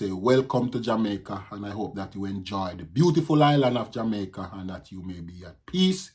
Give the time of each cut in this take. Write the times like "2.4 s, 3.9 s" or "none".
none